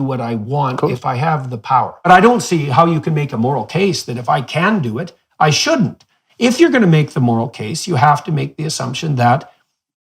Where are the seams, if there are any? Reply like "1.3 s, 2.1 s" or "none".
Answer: 2.1 s